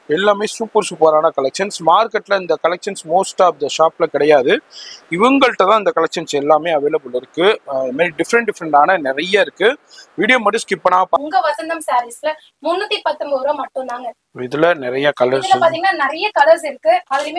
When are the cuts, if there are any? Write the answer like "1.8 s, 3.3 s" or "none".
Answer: 11.2 s